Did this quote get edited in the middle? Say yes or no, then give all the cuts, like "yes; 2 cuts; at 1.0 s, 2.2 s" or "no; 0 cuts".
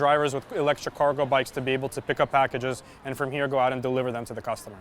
no; 0 cuts